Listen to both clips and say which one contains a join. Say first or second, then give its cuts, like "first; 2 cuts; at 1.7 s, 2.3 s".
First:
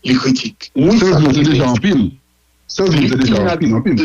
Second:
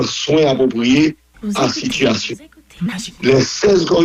first; 1 cut; at 0.9 s